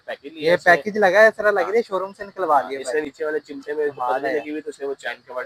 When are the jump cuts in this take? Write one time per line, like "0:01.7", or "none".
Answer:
none